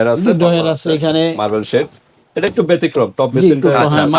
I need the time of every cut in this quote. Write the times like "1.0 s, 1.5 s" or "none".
none